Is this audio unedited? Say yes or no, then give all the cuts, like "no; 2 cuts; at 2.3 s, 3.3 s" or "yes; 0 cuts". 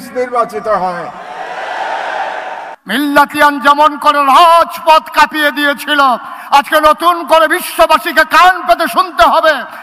no; 1 cut; at 2.6 s